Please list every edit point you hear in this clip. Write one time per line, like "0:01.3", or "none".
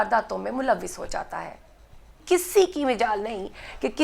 0:02.1